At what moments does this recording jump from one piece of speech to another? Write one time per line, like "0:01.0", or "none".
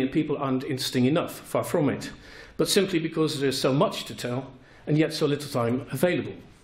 0:01.2

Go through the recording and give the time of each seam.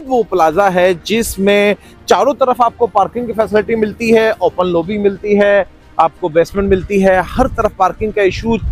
none

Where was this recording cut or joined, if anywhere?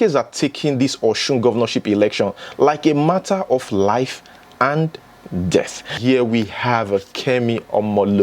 0:06.0

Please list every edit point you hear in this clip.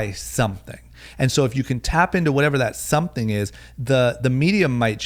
none

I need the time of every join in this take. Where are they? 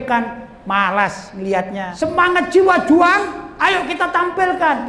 0:01.8

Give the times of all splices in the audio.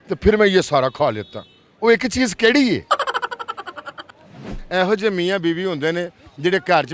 0:02.8
0:04.6

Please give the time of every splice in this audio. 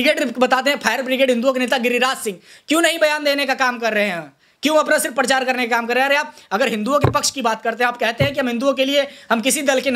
none

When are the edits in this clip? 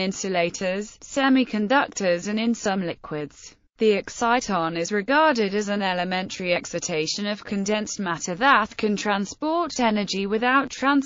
0:03.3

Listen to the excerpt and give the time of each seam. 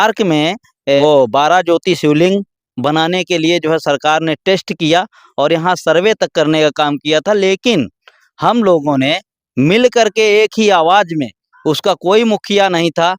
0:01.0

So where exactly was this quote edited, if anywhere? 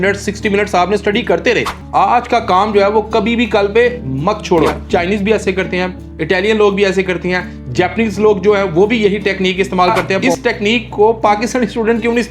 0:01.8
0:04.8
0:10.3

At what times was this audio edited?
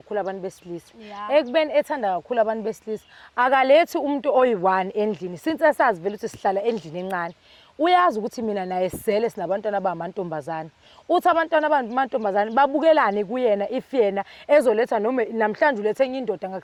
none

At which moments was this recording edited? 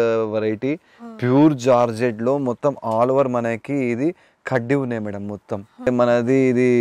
0:05.9

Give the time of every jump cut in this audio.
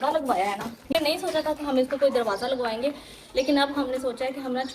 0:00.9

